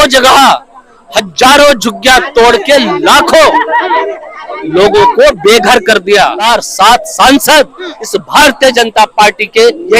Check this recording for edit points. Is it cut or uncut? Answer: cut